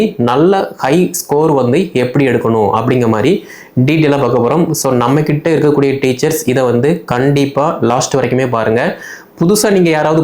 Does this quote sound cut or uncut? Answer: uncut